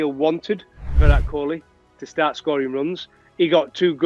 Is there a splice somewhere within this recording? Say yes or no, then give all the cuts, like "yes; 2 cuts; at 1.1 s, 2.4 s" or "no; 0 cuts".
yes; 1 cut; at 1.0 s